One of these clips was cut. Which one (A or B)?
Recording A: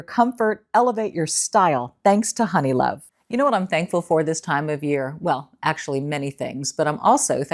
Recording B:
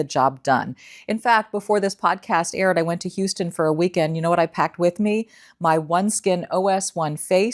A